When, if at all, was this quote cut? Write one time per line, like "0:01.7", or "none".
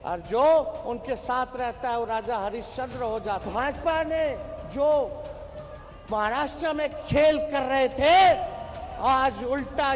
0:03.4